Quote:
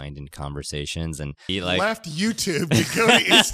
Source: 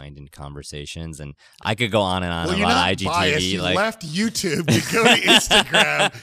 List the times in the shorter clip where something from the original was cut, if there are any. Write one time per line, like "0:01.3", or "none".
0:01.5